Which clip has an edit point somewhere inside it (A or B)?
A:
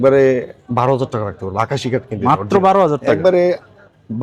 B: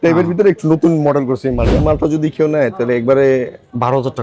B